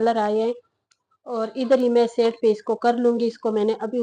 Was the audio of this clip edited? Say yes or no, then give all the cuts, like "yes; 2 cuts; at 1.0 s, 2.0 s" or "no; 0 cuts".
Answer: no; 0 cuts